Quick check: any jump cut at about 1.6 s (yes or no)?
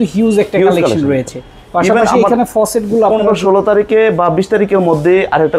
no